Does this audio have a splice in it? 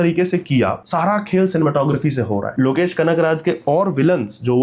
yes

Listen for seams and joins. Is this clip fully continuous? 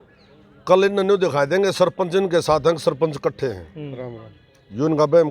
yes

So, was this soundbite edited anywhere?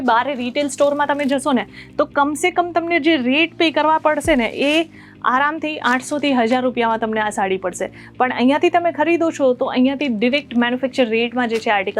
no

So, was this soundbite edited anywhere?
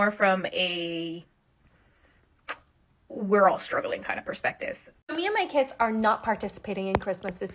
yes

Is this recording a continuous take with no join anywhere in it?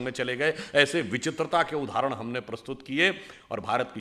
yes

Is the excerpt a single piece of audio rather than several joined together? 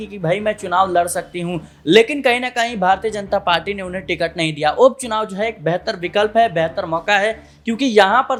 yes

